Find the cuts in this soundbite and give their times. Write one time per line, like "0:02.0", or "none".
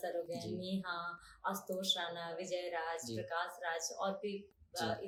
none